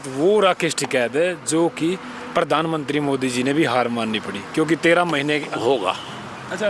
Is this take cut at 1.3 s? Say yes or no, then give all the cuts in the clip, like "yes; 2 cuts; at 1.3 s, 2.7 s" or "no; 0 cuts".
no; 1 cut; at 5.6 s